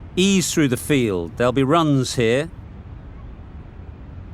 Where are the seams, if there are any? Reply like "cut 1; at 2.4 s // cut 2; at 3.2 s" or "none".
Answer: cut 1; at 2.5 s